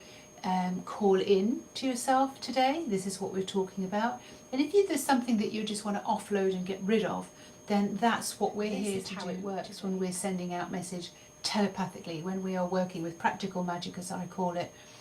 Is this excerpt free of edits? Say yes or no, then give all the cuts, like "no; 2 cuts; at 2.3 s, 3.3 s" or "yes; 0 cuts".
no; 1 cut; at 9.2 s